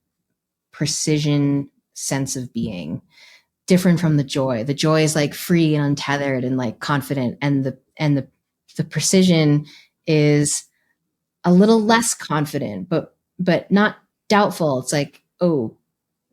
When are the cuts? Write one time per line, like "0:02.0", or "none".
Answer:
none